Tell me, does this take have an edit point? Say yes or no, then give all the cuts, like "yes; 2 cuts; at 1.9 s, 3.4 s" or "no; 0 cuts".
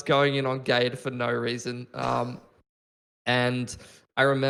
no; 0 cuts